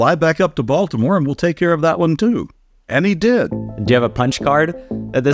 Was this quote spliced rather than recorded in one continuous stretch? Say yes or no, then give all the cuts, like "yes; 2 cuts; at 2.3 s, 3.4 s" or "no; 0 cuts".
no; 0 cuts